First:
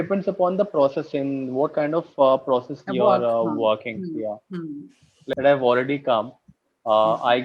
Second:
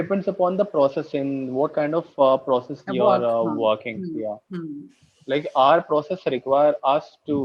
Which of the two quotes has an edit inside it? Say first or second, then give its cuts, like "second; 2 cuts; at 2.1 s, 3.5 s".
first; 1 cut; at 5.3 s